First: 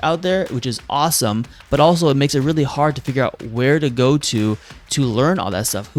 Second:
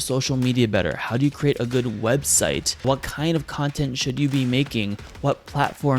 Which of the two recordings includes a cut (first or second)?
second